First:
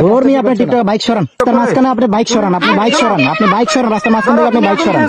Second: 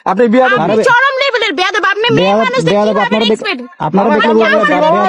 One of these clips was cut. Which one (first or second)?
first